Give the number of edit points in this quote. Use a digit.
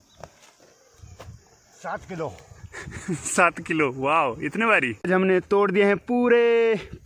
1